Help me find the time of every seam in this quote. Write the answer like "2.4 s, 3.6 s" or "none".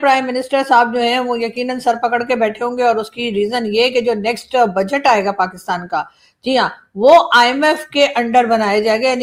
none